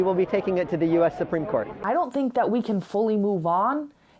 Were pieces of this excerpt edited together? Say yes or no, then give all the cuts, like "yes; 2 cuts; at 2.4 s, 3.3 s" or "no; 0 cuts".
yes; 1 cut; at 1.7 s